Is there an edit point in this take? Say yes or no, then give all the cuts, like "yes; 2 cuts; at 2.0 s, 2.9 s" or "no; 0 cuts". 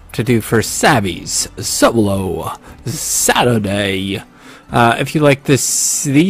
yes; 1 cut; at 2.4 s